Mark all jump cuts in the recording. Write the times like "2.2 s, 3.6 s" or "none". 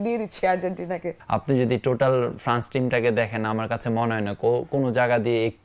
1.1 s